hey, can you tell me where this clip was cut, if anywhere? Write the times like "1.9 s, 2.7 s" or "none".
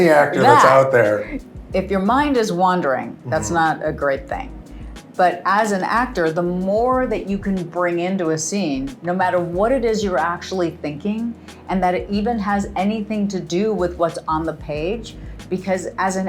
1.4 s